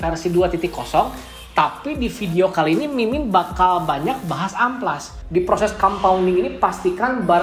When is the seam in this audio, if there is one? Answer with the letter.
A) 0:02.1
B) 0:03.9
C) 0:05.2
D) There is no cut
C